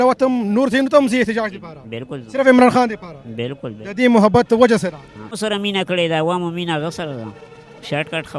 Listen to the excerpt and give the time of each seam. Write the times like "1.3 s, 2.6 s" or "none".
none